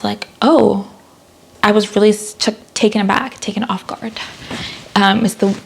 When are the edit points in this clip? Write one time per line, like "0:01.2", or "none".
0:01.5